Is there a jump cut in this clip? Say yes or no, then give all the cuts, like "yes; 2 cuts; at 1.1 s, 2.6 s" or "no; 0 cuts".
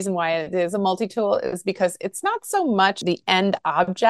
yes; 1 cut; at 3.0 s